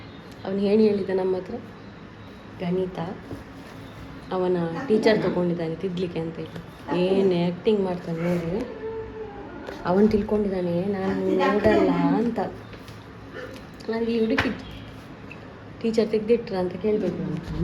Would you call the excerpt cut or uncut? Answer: uncut